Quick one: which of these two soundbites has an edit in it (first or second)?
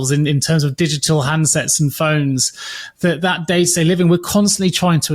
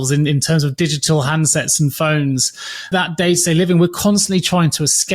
second